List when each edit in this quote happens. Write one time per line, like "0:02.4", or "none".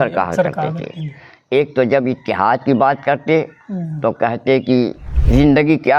none